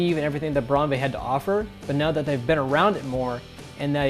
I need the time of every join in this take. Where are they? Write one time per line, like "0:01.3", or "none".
none